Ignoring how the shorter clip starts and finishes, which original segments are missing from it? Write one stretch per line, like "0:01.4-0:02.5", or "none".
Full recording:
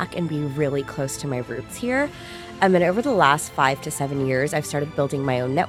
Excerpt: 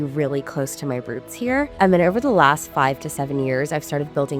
0:02.1-0:02.5